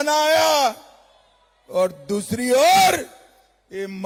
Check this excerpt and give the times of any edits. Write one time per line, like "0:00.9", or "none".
none